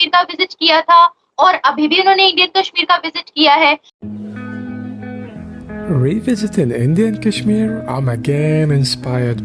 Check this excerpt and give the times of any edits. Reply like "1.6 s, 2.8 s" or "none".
3.9 s